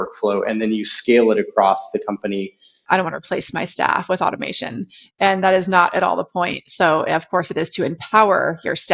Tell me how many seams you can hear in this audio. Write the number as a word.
one